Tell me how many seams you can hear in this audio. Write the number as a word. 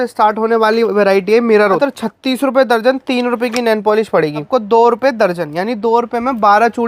two